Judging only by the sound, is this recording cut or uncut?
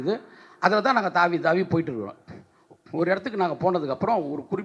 uncut